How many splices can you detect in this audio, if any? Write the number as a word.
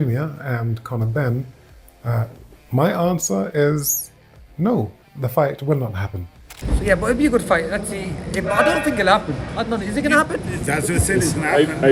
one